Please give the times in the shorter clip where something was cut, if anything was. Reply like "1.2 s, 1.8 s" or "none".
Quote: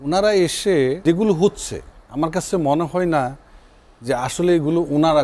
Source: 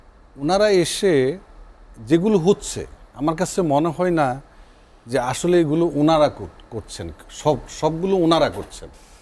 1.0 s